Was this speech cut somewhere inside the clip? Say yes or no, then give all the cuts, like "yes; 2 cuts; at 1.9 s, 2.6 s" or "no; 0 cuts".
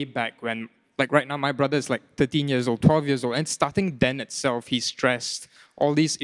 no; 0 cuts